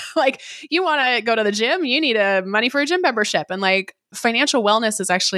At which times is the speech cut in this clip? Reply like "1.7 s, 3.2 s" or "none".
4.1 s